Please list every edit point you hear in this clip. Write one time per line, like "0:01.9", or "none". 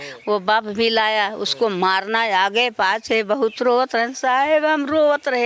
none